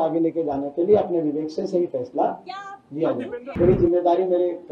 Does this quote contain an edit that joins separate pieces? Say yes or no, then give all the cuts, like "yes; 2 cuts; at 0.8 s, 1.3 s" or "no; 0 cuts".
yes; 1 cut; at 3.5 s